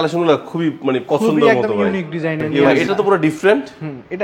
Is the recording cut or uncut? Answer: cut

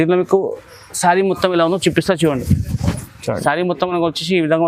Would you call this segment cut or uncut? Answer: uncut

